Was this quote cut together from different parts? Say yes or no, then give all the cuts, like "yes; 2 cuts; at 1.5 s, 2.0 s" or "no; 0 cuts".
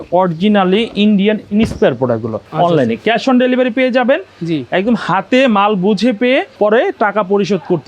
yes; 2 cuts; at 2.4 s, 6.5 s